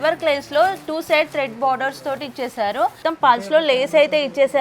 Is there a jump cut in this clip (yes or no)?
yes